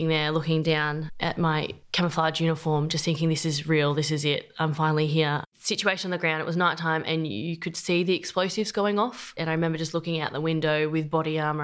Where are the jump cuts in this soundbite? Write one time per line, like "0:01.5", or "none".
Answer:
0:05.5
0:09.3

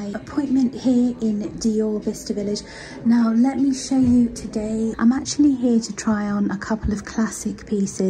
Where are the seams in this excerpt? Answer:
0:04.9

